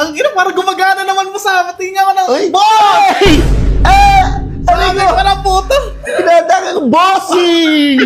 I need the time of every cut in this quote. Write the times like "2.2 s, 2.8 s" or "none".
none

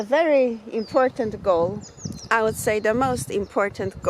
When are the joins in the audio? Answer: none

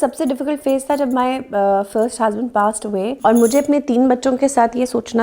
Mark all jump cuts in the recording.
3.2 s

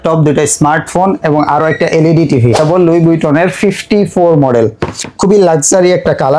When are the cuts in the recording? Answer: 2.6 s

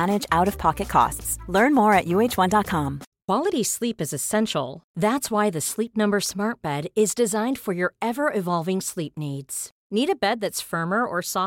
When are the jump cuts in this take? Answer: 3.0 s

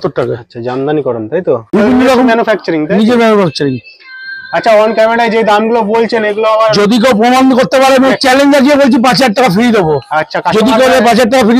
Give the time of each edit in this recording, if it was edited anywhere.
1.7 s

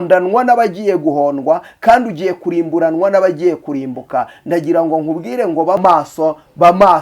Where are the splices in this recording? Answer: 5.8 s

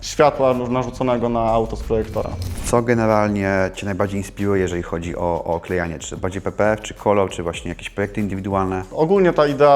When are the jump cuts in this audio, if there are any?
2.5 s, 8.9 s

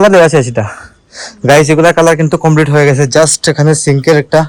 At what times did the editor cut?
none

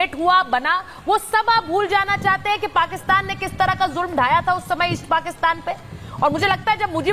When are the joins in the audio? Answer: none

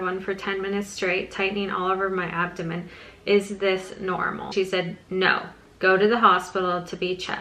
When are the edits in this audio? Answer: 4.5 s

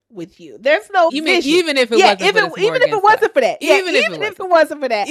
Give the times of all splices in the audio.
1.2 s

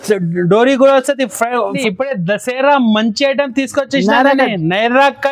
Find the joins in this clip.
1.8 s

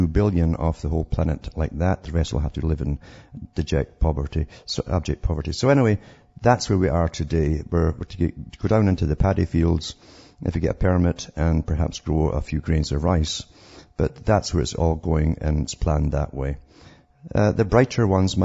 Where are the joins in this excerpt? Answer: 4.7 s

